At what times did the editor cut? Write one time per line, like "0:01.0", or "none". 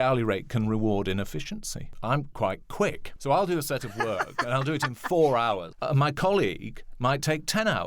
0:01.9
0:03.1
0:05.8